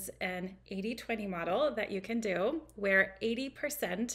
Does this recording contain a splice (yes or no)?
no